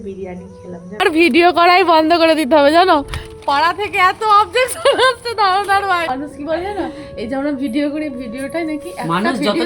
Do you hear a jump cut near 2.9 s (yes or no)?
no